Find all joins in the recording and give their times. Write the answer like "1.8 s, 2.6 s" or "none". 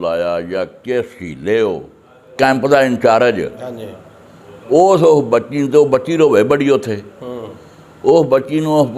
2.3 s